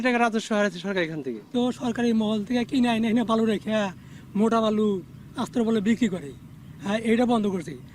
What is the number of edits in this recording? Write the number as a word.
one